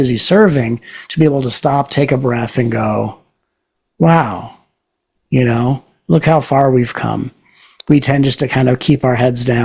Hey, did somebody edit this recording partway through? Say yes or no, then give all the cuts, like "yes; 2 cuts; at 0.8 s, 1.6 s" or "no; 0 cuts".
no; 0 cuts